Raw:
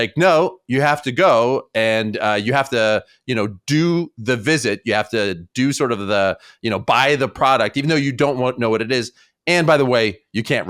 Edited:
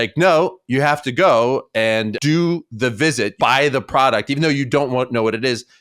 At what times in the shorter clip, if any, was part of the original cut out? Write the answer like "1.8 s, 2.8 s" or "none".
2.1 s, 3.3 s